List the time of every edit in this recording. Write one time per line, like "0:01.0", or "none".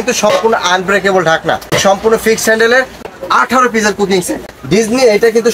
0:01.8
0:03.0
0:04.5